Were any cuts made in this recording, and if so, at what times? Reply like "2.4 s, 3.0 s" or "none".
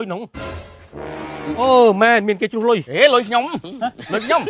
none

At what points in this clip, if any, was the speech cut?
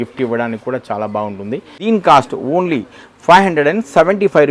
1.7 s

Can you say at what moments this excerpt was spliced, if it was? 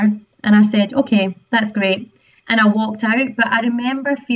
none

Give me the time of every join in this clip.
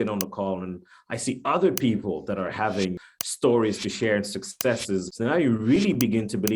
3.0 s, 5.1 s

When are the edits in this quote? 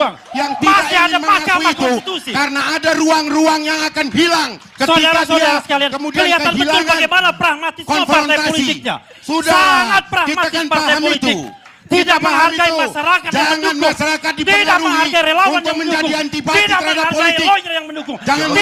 none

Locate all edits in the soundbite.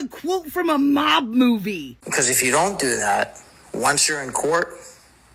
none

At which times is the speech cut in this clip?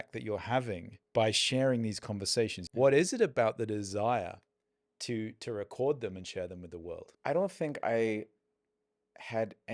0.9 s, 2.6 s, 7.1 s

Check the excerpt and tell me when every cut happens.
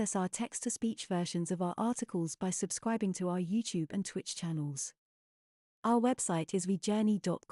none

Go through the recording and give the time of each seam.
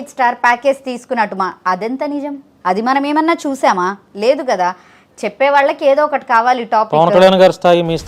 none

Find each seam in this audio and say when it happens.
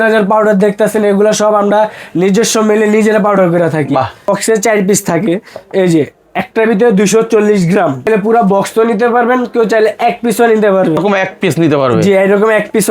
4.3 s, 8.1 s, 11.0 s

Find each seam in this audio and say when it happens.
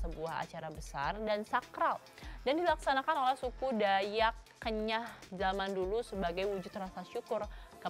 none

